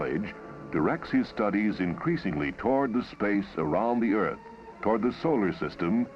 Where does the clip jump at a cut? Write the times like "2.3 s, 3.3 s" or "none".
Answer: none

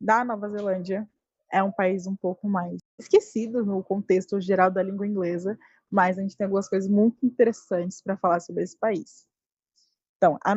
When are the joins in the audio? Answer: 3.1 s

